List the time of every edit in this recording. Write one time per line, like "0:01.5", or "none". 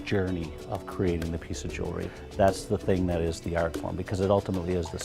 0:02.0